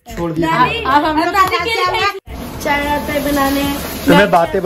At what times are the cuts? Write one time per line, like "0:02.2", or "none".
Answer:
0:02.3